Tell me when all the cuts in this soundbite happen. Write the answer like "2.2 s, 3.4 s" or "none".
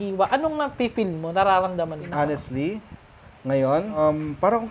2.0 s, 4.0 s